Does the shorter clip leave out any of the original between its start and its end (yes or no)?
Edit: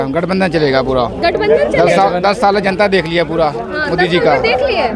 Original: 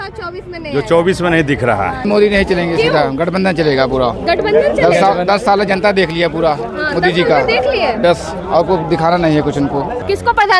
no